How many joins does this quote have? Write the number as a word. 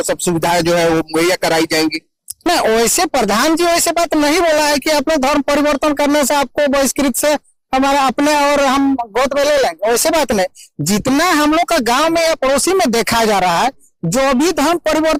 zero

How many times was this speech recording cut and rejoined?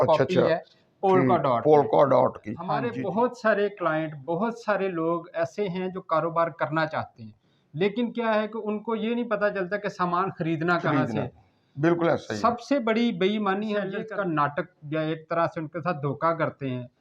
two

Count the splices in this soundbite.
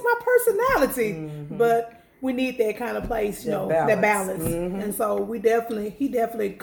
zero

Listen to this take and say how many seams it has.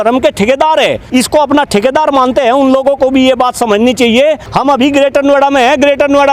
two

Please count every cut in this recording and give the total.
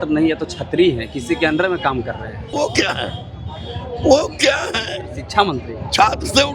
one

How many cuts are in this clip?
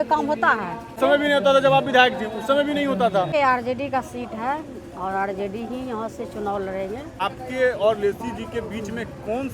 three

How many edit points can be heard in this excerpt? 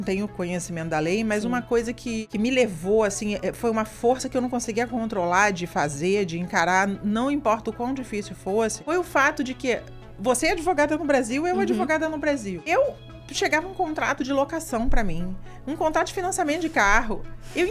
three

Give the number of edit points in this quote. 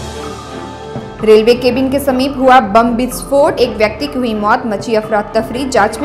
one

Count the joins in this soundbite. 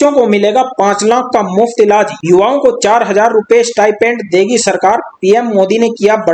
zero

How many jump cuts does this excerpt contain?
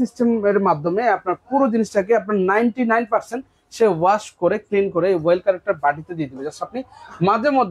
zero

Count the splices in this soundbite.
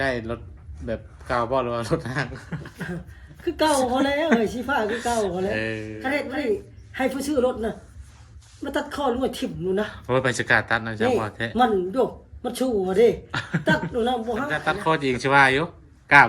two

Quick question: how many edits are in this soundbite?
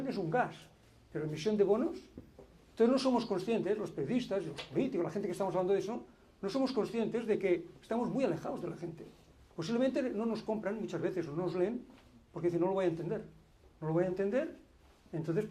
zero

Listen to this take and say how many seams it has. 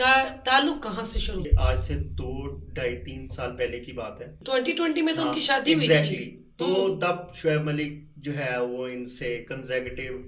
two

